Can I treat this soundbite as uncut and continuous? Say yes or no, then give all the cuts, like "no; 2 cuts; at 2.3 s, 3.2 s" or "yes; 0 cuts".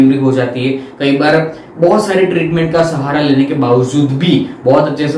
yes; 0 cuts